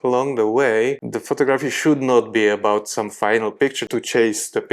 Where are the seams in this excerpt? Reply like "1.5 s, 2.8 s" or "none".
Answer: 1.1 s, 3.8 s